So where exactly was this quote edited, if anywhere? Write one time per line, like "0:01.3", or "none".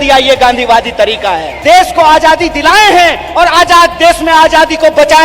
0:01.5